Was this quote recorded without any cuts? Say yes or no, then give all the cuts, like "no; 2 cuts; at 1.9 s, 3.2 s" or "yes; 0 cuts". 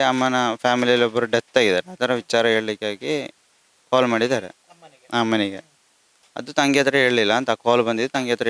yes; 0 cuts